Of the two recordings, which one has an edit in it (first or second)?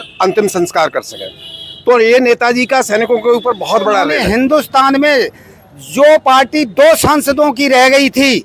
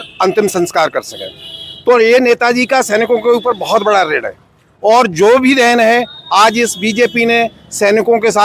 first